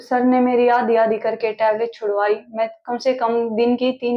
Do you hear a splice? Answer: no; 0 cuts

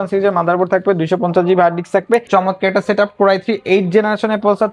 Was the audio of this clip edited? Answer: yes; 1 cut; at 2.3 s

